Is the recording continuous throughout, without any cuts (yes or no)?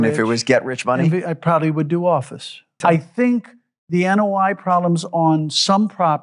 no